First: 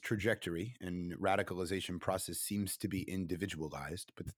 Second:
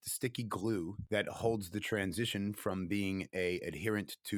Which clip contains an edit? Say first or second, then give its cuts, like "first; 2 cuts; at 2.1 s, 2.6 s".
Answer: second; 1 cut; at 1.0 s